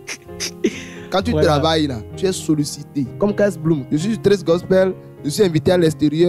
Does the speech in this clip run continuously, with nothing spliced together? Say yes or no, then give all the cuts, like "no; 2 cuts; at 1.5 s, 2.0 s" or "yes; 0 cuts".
no; 3 cuts; at 2.0 s, 3.1 s, 3.8 s